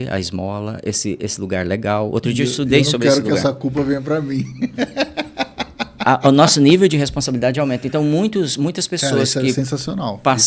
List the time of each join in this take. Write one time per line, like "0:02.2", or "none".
none